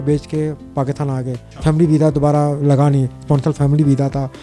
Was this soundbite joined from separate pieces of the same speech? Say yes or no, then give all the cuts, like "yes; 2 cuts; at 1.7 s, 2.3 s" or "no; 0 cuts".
yes; 1 cut; at 1.4 s